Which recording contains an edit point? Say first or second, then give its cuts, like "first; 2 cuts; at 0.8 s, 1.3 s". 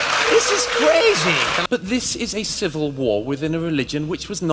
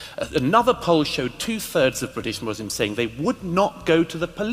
first; 1 cut; at 1.7 s